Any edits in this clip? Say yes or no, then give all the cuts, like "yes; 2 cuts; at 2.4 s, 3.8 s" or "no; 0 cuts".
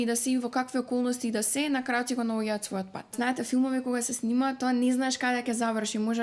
yes; 1 cut; at 3.1 s